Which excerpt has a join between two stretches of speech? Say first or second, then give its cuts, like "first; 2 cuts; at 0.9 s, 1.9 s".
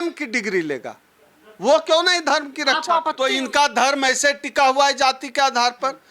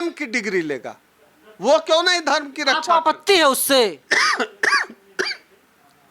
first; 1 cut; at 3.1 s